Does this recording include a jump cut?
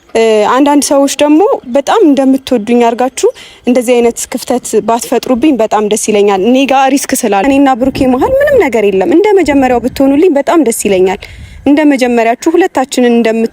yes; 1 cut; at 7.4 s

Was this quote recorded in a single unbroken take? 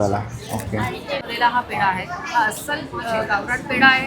no; 1 cut; at 1.3 s

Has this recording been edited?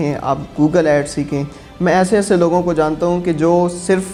no; 0 cuts

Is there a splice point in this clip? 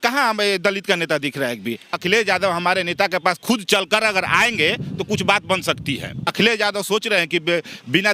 yes; 2 cuts; at 1.9 s, 6.3 s

